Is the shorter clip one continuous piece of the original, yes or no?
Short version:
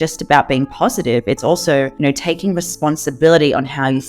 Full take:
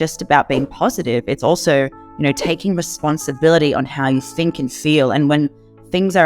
no